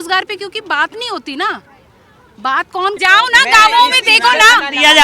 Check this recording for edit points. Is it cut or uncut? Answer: cut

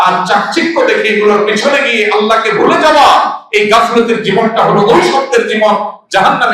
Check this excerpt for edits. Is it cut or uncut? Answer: uncut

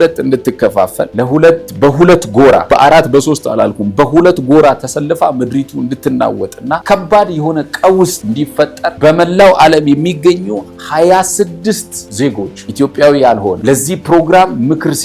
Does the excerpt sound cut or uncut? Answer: cut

